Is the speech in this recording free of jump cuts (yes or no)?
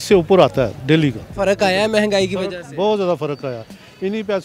no